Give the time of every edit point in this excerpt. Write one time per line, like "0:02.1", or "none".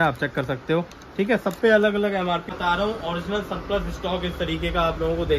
0:02.5